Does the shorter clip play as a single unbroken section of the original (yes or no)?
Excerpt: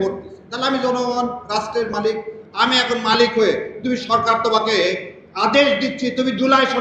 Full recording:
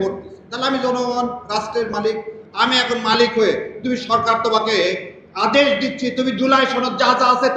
yes